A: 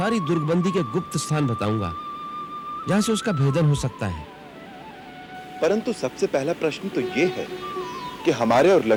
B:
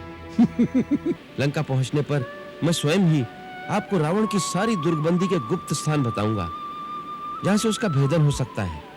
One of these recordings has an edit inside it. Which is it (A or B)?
B